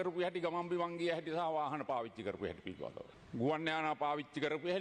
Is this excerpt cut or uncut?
cut